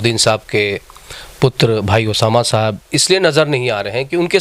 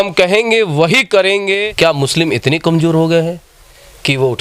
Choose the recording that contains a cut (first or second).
second